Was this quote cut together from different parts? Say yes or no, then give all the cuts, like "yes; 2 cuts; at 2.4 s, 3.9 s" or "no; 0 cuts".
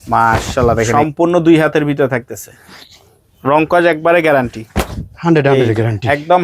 yes; 1 cut; at 0.9 s